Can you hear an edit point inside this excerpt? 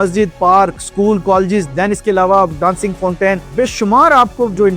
no; 0 cuts

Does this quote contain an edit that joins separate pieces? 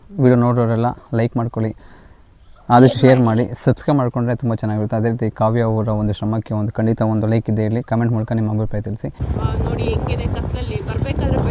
yes; 1 cut; at 9.1 s

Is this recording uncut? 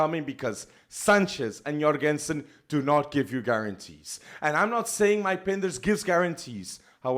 yes; 0 cuts

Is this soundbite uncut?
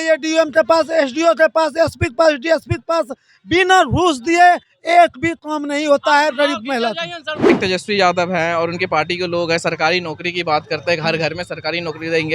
no; 1 cut; at 7.4 s

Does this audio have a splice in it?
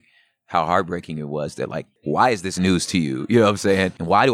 yes; 1 cut; at 1.9 s

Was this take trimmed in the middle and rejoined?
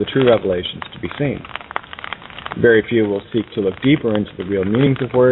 yes; 1 cut; at 2.4 s

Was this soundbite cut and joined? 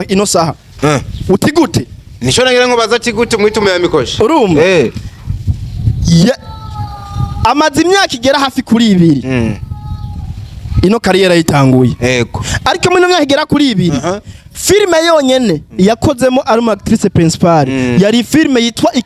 no; 0 cuts

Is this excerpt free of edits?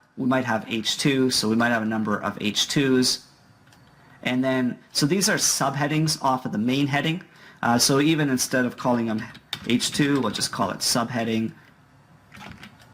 yes; 0 cuts

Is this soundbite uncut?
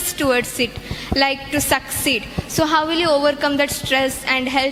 yes; 0 cuts

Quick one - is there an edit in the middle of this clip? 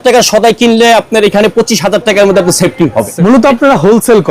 yes; 1 cut; at 3.1 s

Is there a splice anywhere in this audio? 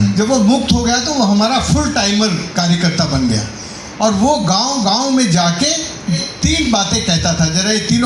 yes; 1 cut; at 6.1 s

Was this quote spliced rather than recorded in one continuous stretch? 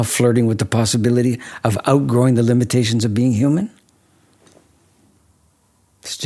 yes; 1 cut; at 5.2 s

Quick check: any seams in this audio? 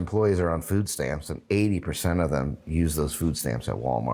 no; 0 cuts

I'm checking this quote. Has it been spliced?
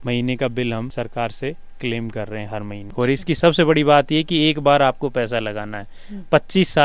yes; 1 cut; at 2.8 s

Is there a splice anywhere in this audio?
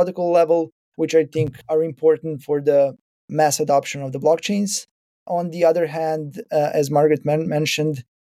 no; 0 cuts

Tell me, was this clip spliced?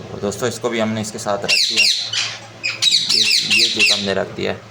no; 0 cuts

